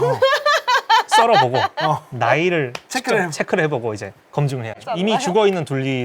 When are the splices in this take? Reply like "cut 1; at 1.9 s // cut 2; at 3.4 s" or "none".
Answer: none